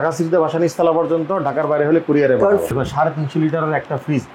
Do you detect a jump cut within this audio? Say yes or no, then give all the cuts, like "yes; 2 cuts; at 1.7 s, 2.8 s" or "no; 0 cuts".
yes; 1 cut; at 2.7 s